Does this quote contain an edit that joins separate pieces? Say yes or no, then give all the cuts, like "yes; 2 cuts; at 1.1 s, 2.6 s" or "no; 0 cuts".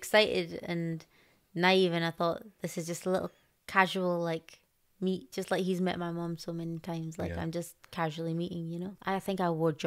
no; 0 cuts